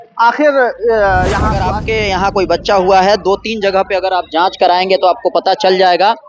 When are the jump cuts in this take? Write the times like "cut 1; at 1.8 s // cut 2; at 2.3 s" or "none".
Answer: cut 1; at 1.7 s